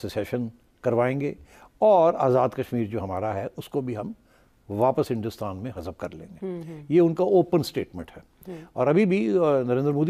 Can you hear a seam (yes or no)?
no